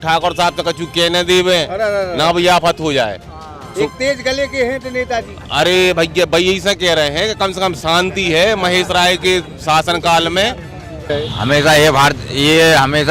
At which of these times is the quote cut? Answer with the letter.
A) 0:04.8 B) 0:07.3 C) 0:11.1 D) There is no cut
C